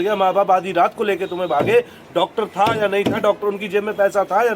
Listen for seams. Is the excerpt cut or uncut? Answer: uncut